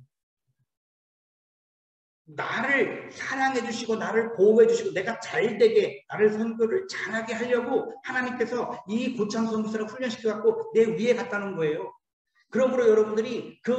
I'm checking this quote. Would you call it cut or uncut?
uncut